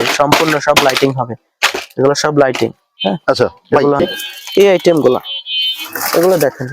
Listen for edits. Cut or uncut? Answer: cut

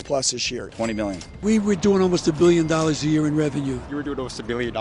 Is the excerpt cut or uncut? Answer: cut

